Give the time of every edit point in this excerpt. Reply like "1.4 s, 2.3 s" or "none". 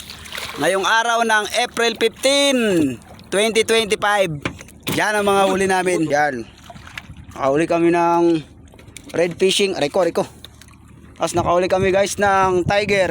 6.1 s